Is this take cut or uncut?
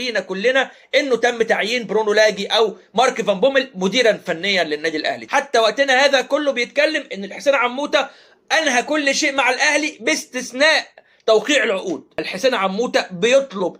cut